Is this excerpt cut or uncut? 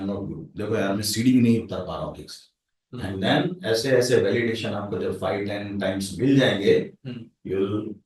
uncut